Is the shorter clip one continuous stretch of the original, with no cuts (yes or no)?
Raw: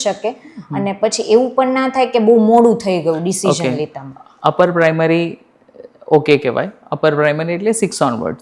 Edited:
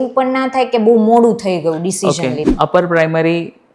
no